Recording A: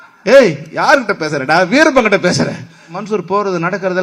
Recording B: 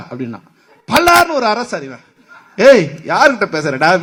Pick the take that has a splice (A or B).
A